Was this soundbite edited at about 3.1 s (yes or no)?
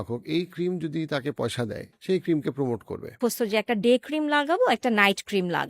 yes